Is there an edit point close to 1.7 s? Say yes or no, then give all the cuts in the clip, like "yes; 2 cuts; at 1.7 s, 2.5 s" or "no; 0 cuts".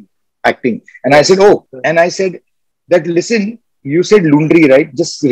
yes; 1 cut; at 1.7 s